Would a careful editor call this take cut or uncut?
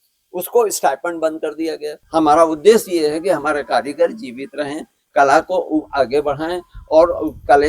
cut